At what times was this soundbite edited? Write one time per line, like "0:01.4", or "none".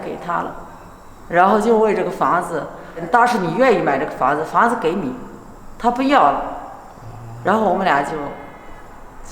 0:03.0